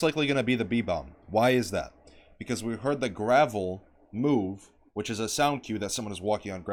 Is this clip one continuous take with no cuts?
yes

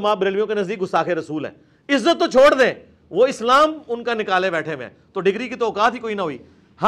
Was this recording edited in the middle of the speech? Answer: no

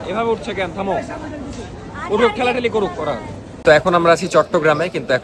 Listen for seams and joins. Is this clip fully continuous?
no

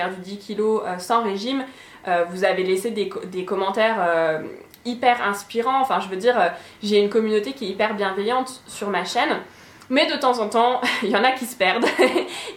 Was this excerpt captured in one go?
yes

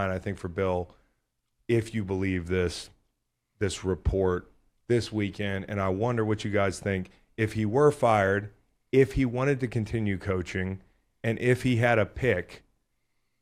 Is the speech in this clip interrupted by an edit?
no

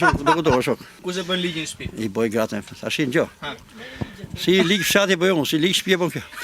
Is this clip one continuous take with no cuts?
no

